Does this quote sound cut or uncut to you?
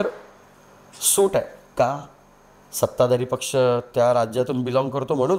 uncut